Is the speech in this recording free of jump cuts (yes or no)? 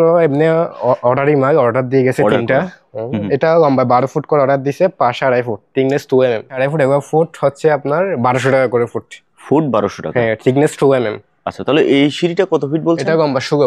no